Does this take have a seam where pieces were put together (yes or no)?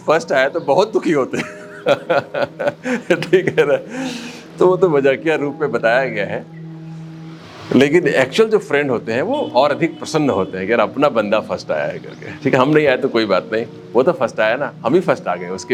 no